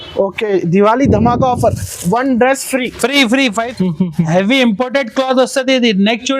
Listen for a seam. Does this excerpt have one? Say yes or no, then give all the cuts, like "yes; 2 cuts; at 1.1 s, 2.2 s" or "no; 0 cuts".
yes; 1 cut; at 3.7 s